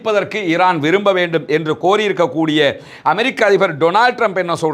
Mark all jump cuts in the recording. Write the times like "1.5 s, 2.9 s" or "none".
none